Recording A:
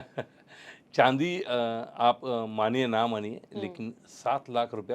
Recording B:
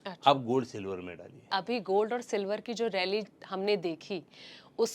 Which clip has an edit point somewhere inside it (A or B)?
B